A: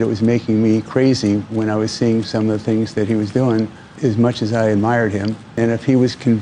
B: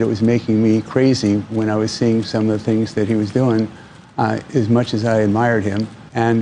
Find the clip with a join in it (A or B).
A